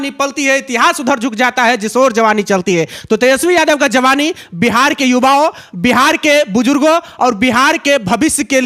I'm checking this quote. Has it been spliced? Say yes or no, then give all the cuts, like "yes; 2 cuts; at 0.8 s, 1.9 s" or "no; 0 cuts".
no; 0 cuts